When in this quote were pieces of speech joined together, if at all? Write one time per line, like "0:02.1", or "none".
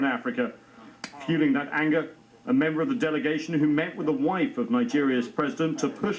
none